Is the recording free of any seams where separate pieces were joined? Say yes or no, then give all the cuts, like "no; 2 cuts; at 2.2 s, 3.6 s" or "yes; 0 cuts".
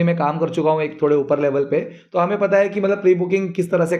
yes; 0 cuts